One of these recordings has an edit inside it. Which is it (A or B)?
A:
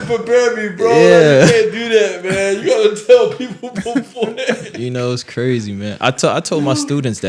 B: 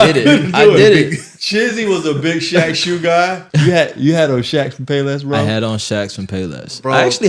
B